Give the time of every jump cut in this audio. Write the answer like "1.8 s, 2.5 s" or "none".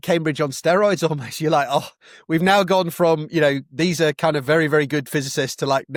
none